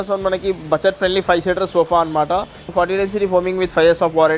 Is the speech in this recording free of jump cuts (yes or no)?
no